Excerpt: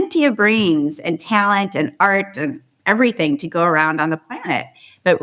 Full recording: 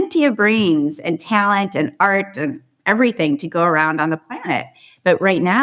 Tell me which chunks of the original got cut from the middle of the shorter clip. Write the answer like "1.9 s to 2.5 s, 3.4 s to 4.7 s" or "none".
none